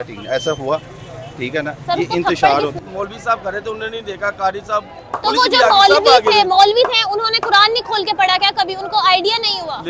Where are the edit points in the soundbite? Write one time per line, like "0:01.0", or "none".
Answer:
0:02.8